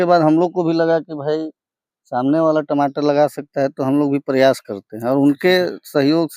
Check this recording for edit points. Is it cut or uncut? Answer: uncut